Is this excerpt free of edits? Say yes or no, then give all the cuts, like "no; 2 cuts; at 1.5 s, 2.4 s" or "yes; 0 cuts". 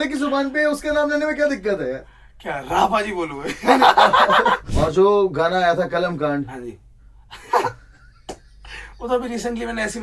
no; 1 cut; at 4.7 s